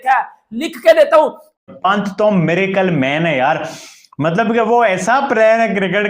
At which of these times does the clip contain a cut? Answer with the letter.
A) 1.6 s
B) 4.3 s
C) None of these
A